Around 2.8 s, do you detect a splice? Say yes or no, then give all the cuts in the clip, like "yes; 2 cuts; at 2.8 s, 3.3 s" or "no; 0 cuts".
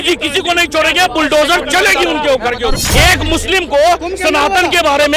yes; 1 cut; at 2.8 s